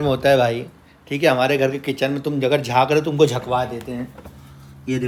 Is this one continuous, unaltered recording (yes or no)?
yes